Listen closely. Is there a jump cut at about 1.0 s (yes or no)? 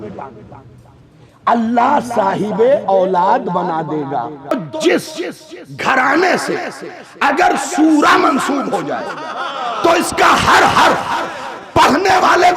no